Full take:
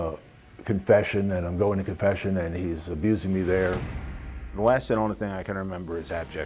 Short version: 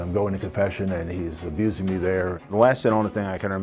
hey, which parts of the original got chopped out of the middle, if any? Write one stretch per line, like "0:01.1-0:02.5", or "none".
0:03.8-0:04.4